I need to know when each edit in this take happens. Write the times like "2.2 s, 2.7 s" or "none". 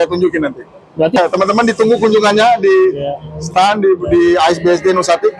1.1 s